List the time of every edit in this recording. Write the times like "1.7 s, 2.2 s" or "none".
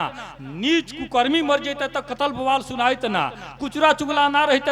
none